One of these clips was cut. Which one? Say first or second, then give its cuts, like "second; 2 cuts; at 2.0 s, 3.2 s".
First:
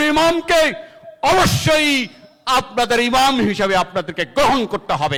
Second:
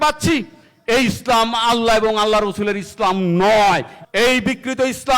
second; 1 cut; at 4.0 s